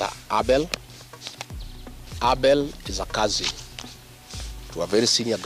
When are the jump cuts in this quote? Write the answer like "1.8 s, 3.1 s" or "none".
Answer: none